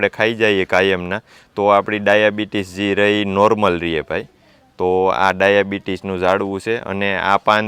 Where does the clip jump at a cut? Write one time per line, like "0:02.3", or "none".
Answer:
none